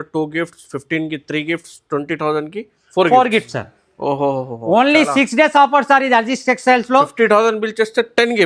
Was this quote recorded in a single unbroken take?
yes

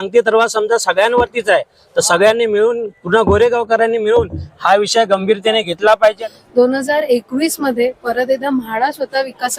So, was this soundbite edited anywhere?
yes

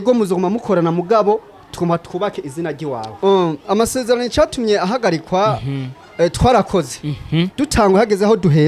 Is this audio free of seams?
no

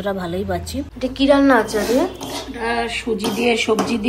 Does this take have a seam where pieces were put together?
yes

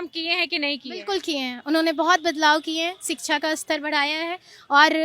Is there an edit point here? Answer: no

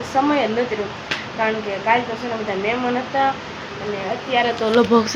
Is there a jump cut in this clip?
no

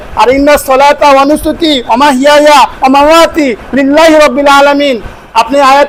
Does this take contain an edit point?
no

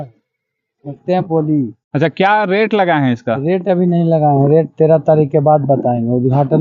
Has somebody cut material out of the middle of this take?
no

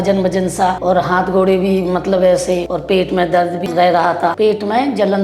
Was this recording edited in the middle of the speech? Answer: yes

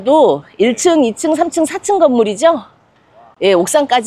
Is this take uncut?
yes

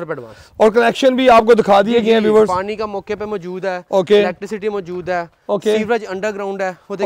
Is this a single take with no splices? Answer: yes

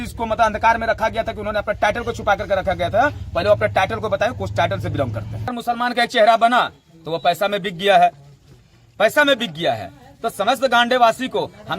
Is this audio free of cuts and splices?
no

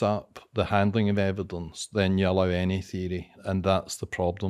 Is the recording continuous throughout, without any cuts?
no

